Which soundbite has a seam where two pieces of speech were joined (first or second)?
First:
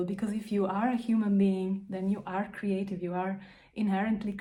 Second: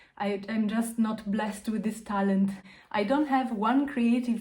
second